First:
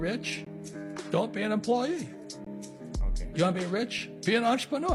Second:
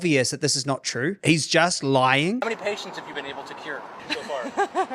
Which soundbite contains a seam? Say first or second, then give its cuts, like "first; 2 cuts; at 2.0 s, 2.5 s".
second; 2 cuts; at 1.2 s, 2.4 s